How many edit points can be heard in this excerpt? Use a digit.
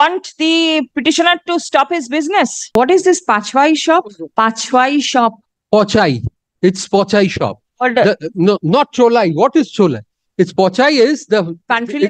2